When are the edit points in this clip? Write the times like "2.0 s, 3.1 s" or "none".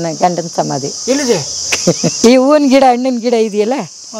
2.2 s